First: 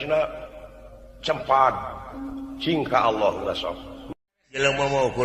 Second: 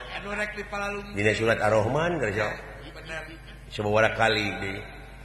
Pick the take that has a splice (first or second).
first